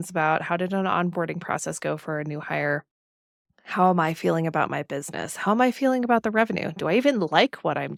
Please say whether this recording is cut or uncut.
uncut